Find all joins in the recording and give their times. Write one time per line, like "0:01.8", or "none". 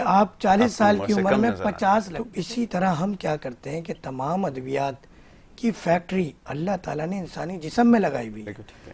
0:02.2